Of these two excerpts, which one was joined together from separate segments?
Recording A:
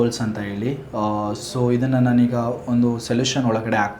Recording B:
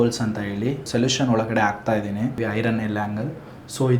B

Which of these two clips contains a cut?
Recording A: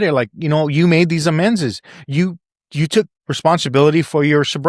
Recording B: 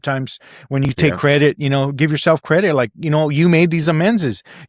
A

